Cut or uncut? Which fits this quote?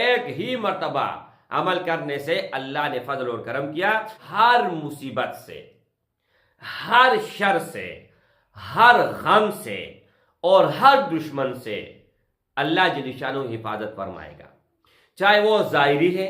cut